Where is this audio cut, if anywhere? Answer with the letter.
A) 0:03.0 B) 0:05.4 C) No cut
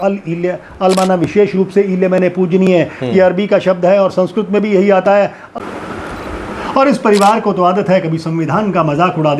B